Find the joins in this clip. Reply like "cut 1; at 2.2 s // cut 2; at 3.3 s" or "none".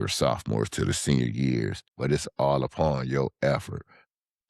cut 1; at 1.8 s